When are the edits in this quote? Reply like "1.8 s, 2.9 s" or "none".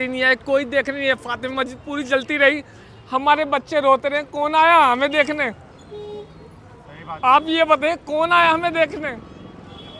none